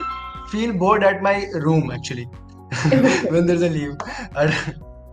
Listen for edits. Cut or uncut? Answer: uncut